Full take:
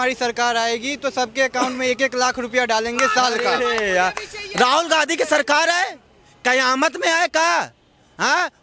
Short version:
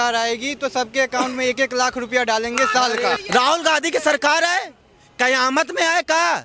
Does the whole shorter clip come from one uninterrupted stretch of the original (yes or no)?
no